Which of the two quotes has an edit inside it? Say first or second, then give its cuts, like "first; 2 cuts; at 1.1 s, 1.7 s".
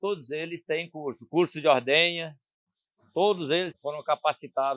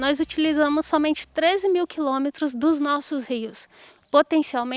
first; 1 cut; at 3.8 s